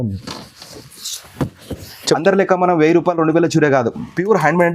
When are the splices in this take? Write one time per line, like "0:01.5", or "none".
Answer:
0:02.2